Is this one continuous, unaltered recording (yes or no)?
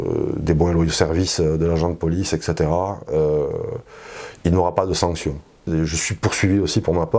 no